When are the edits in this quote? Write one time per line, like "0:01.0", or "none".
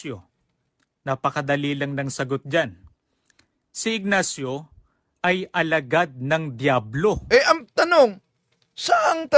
0:07.2